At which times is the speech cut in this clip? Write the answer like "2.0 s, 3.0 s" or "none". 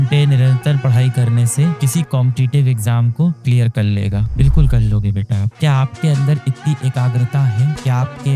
5.5 s

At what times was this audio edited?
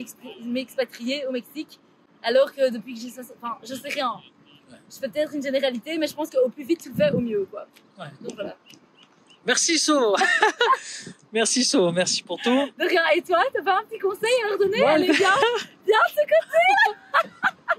none

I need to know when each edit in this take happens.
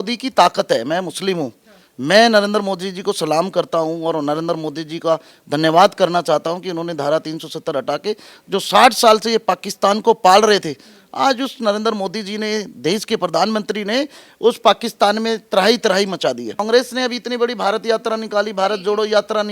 16.6 s

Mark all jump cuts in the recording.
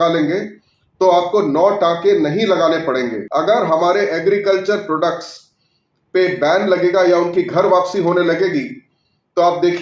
3.2 s

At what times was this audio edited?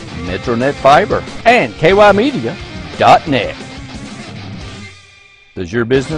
1.3 s

